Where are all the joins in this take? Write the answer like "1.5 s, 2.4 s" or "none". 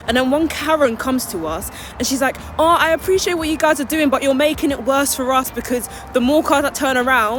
none